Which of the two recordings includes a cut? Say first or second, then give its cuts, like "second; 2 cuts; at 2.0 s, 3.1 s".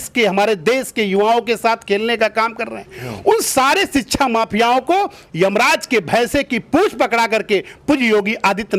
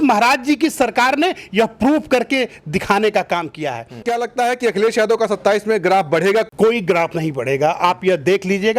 second; 2 cuts; at 4.0 s, 6.5 s